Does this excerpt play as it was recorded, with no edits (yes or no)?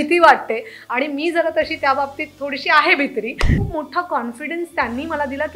no